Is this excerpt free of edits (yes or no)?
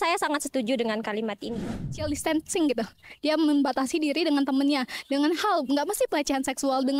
no